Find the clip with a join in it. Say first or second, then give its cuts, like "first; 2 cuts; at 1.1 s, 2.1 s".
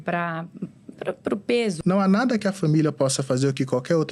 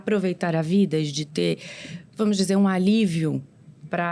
first; 1 cut; at 1.8 s